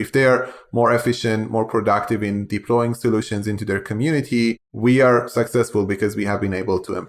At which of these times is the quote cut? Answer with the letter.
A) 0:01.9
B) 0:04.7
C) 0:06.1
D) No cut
B